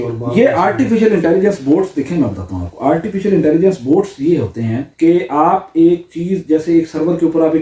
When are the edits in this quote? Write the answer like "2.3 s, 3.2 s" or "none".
4.8 s

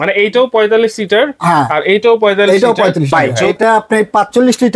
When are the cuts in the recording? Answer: 3.1 s

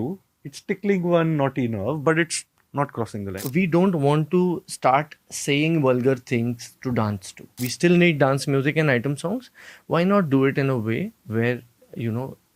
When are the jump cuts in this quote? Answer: 3.4 s, 7.6 s

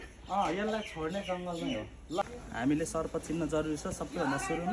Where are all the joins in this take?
2.4 s

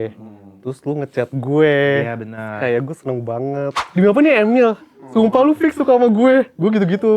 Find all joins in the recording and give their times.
3.8 s

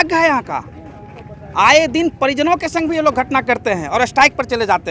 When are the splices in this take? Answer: none

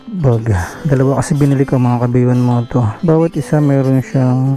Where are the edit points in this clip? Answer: 0.8 s, 2.9 s

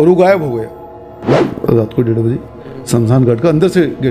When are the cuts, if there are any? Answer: 1.3 s

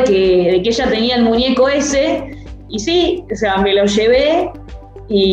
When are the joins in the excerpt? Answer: 2.7 s

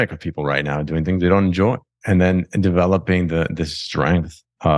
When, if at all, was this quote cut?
1.9 s

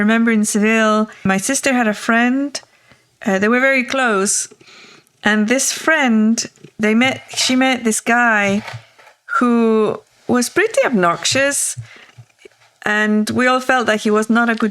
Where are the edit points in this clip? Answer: 1.2 s, 6.8 s

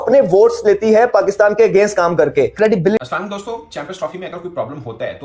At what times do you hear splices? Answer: 3.0 s

